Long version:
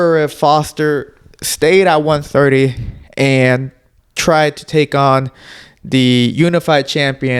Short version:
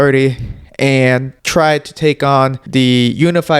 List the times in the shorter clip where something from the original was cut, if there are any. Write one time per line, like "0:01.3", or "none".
0:01.4
0:02.6